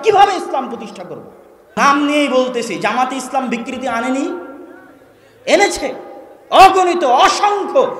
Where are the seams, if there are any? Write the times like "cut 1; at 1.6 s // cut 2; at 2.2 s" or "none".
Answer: cut 1; at 1.8 s